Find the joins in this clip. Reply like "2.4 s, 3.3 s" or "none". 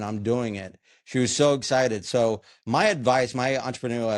none